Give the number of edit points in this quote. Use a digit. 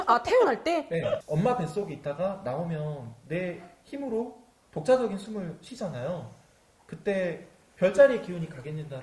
1